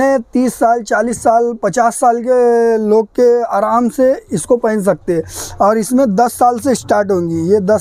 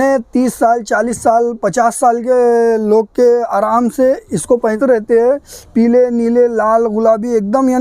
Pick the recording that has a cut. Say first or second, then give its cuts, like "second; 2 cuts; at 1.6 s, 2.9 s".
second; 1 cut; at 4.8 s